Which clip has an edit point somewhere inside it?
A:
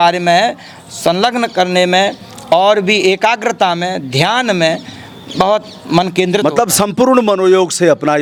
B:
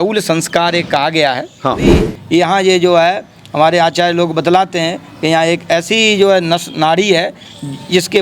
B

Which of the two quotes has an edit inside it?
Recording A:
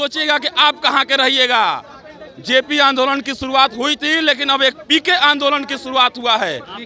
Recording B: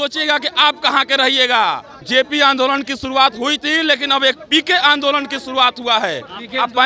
B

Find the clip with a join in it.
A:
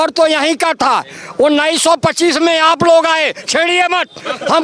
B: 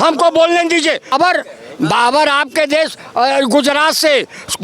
B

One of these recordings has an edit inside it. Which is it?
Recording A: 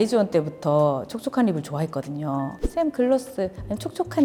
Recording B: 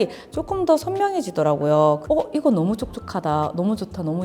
B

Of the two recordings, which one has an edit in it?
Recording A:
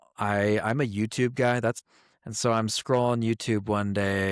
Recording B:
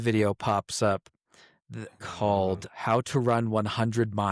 A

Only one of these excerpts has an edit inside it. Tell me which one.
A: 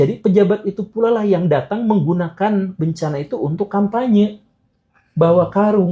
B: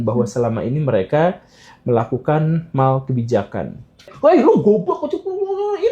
B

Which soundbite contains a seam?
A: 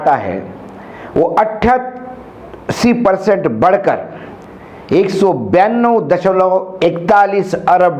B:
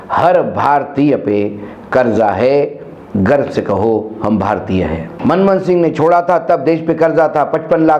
B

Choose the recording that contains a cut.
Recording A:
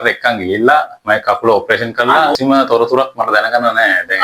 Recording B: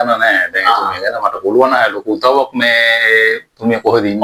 A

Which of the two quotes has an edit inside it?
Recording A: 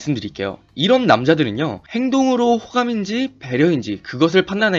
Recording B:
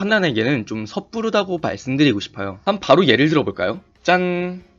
B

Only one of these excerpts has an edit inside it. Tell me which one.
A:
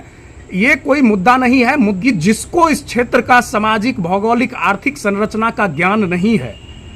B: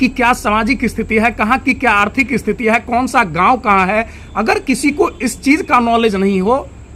A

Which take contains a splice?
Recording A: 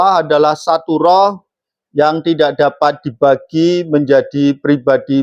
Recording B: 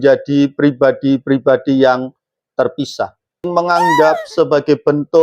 B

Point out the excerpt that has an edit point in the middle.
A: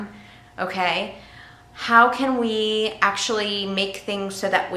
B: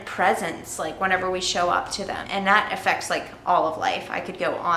B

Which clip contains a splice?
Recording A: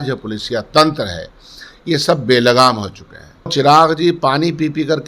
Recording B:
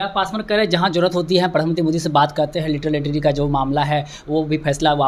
A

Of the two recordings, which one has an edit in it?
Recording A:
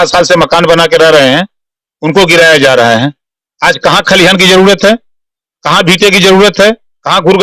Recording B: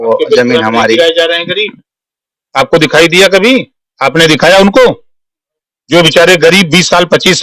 A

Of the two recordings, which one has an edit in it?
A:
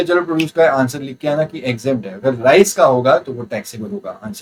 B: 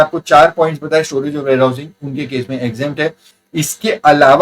B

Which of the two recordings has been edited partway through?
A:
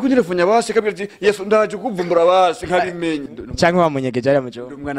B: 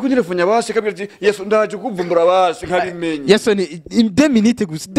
A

